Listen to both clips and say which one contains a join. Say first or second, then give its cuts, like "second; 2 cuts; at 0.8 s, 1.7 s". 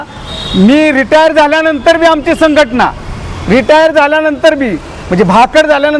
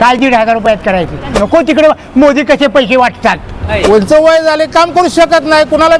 second; 2 cuts; at 1.3 s, 3.7 s